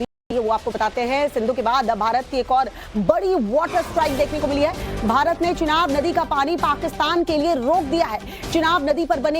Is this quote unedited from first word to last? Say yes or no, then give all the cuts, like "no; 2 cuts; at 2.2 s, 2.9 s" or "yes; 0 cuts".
no; 1 cut; at 0.9 s